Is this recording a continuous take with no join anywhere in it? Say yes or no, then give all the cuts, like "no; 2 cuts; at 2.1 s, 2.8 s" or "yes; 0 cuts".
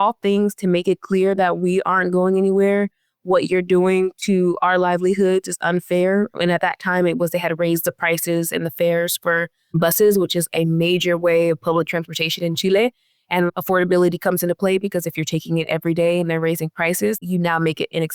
yes; 0 cuts